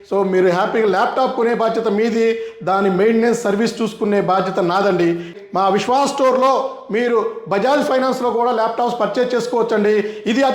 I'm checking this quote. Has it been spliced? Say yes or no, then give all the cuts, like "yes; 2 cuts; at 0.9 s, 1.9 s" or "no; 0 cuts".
yes; 1 cut; at 5.4 s